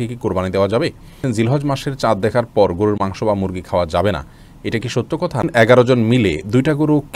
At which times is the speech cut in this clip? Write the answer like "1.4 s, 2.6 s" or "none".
1.1 s, 5.4 s